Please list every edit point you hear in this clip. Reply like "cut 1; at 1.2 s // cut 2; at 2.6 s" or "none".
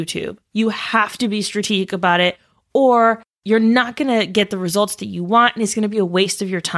cut 1; at 3.3 s